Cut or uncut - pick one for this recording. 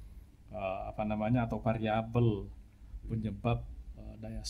uncut